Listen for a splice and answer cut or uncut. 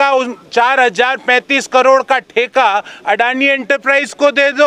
uncut